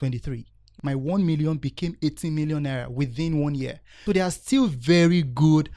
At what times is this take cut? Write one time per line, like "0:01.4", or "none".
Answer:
0:00.8
0:03.8